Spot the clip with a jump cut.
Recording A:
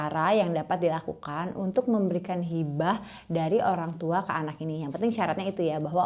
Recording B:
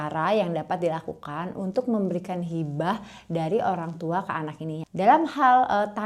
B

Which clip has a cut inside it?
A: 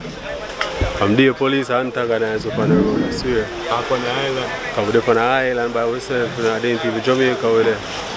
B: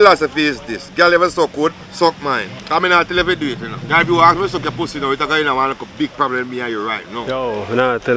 B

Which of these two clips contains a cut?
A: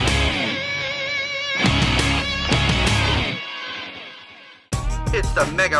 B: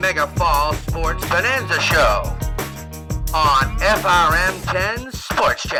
A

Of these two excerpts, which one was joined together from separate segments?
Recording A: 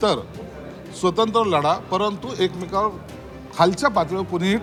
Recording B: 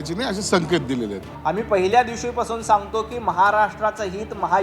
B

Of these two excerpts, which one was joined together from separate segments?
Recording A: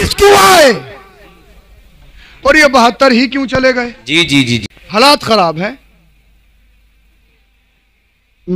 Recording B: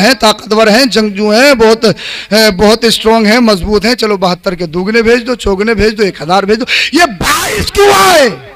A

